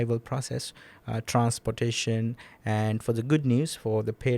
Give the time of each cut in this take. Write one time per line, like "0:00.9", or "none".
none

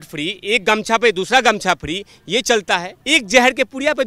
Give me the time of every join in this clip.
0:02.9

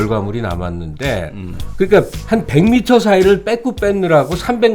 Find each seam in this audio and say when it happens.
0:01.5

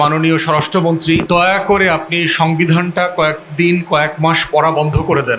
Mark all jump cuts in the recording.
0:01.2

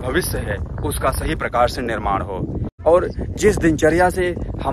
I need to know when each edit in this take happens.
0:02.7

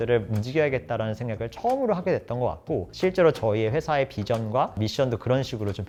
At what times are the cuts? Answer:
none

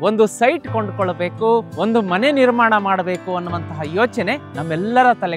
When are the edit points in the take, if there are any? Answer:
0:01.7
0:04.5

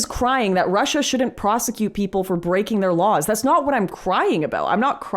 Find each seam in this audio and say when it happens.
none

